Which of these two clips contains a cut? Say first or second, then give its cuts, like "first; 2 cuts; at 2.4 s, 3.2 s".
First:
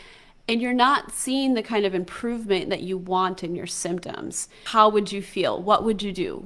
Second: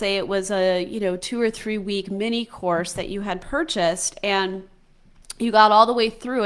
first; 1 cut; at 4.6 s